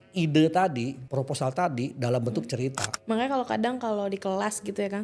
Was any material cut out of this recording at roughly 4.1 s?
no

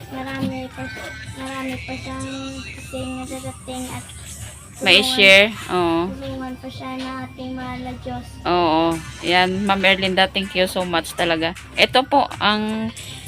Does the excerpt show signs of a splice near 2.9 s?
yes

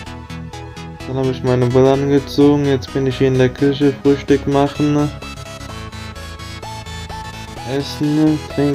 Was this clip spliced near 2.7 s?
no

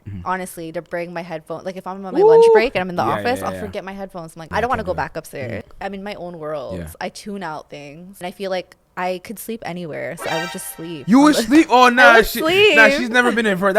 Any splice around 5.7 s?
yes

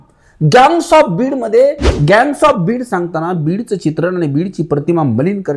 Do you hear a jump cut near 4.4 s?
no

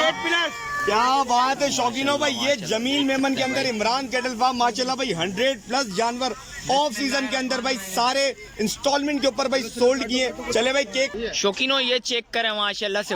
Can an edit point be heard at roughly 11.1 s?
yes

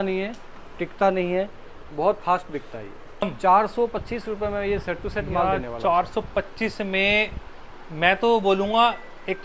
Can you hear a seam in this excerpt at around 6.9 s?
no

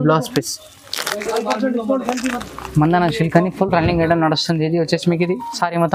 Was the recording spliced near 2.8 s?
no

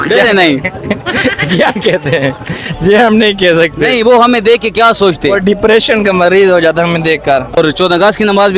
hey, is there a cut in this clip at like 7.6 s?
yes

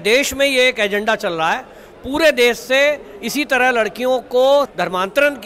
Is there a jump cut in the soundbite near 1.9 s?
no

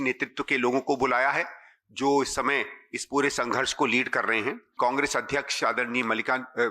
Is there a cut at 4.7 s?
yes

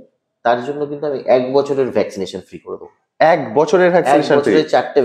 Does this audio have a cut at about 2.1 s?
no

